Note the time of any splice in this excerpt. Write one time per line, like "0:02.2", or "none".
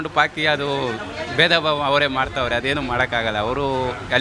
none